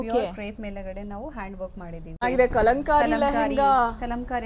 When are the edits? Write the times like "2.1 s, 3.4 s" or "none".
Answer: 2.2 s

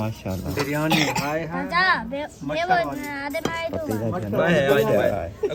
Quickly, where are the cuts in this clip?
none

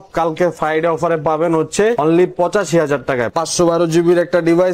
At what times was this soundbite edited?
2.0 s, 3.3 s

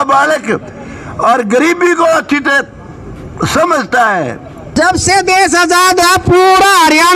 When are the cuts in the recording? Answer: 4.8 s

